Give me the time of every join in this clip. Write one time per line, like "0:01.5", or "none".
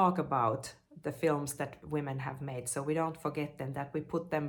none

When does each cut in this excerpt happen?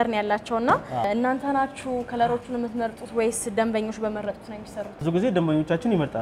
0:01.1
0:05.0

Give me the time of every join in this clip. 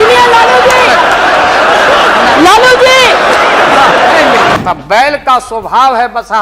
0:04.6

